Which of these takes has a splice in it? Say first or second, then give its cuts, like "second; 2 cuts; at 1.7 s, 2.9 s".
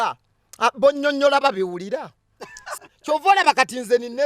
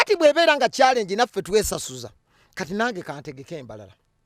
first; 1 cut; at 2.7 s